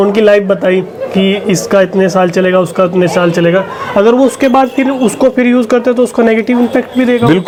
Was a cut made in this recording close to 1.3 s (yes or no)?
no